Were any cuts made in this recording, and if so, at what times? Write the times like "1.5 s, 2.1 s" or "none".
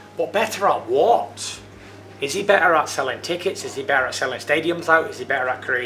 none